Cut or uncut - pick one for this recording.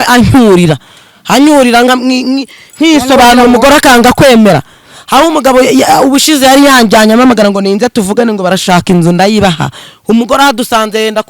uncut